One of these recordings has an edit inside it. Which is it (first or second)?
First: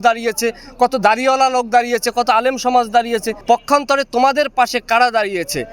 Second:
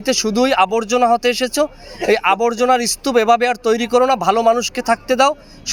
first